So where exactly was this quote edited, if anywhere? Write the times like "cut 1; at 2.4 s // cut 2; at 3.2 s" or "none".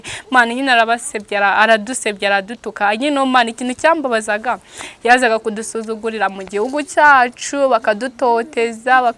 none